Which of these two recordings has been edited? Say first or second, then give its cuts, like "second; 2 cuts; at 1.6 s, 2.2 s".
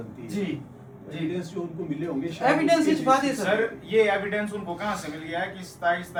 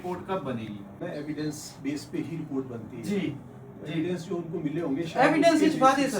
second; 1 cut; at 1.0 s